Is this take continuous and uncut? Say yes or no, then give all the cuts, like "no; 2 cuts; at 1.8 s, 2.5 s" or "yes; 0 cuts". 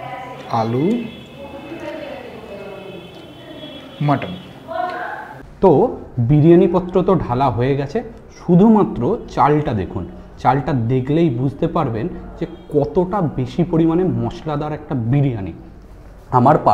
yes; 0 cuts